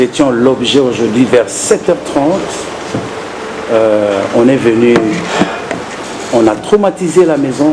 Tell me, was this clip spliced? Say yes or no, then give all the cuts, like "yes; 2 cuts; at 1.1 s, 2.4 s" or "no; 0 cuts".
no; 0 cuts